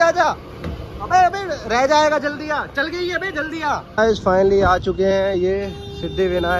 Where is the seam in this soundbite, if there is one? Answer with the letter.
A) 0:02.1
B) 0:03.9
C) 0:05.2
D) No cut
B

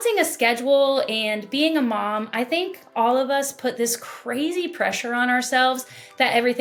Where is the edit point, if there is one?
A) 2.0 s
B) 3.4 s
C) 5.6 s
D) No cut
D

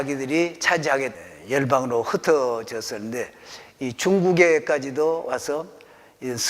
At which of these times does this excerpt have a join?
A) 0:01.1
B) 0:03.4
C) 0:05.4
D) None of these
A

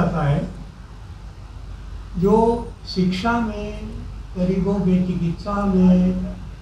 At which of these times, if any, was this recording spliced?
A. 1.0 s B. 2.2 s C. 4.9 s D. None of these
D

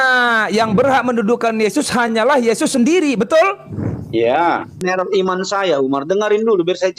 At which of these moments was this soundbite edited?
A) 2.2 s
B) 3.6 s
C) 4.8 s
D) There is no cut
C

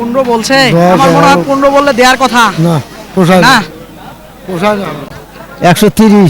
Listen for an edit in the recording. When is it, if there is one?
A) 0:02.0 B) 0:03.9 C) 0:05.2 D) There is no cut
C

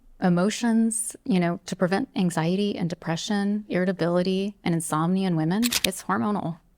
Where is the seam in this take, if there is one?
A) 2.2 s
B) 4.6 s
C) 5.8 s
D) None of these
C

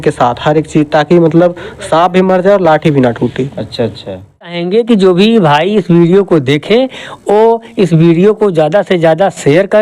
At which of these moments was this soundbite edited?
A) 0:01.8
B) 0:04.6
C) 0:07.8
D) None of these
B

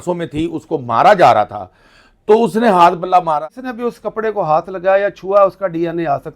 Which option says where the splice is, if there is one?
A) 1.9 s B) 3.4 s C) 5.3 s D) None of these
B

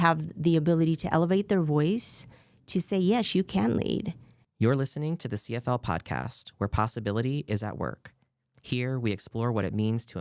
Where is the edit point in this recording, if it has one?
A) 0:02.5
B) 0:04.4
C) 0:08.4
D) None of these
B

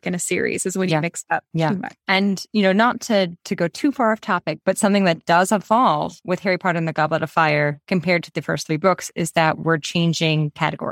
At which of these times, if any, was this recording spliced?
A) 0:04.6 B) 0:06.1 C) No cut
A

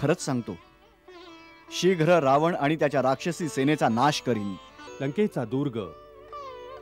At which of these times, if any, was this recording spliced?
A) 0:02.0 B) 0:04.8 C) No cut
B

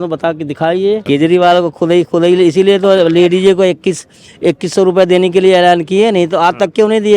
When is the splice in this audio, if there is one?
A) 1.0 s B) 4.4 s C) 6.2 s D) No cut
A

